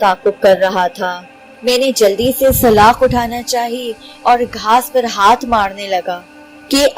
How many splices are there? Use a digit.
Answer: 0